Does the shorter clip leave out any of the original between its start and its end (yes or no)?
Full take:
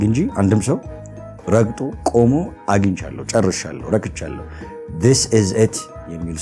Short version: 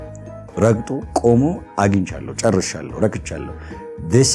no